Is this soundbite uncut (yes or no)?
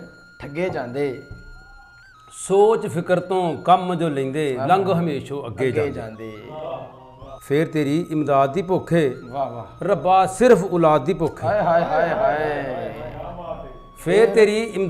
no